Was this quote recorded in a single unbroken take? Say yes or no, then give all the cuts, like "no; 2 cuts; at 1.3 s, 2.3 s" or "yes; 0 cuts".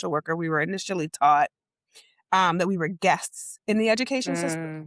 yes; 0 cuts